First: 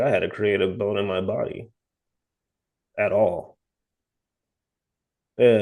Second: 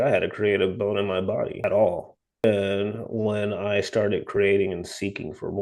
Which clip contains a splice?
second; 2 cuts; at 1.6 s, 2.4 s

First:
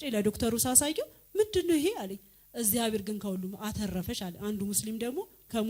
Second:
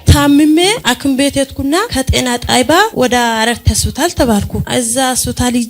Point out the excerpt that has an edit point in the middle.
second; 4 cuts; at 0.8 s, 1.9 s, 2.9 s, 4.6 s

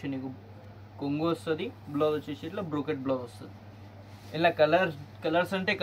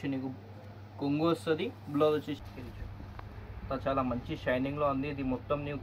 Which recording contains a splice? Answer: second; 1 cut; at 2.4 s

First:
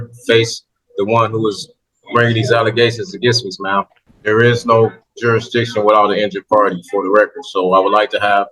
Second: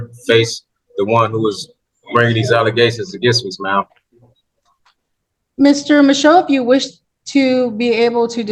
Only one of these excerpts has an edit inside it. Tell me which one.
first; 1 cut; at 4.0 s

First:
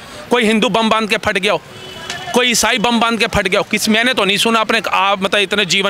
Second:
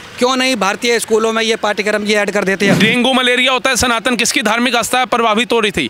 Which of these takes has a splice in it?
second; 1 cut; at 2.8 s

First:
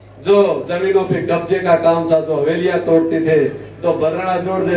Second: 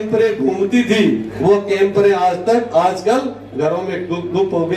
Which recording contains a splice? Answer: second; 1 cut; at 1.3 s

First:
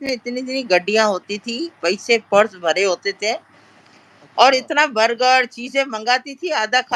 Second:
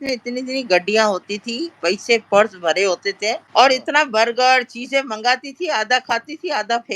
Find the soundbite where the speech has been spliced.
second; 1 cut; at 3.4 s

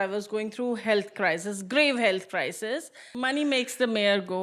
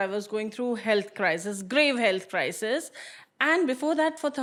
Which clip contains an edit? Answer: first; 1 cut; at 3.1 s

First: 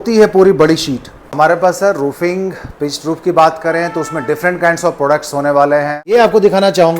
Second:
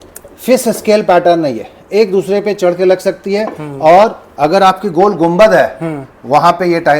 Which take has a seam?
first; 2 cuts; at 1.2 s, 6.1 s

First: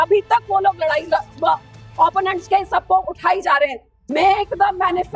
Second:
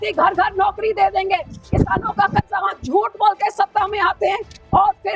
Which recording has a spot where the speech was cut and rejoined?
first; 1 cut; at 3.9 s

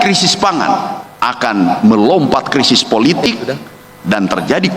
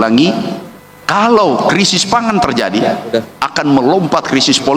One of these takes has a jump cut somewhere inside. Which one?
first; 1 cut; at 1.0 s

